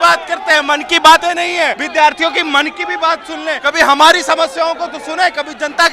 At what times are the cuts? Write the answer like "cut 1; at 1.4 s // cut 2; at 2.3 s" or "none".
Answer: cut 1; at 1.5 s // cut 2; at 3.6 s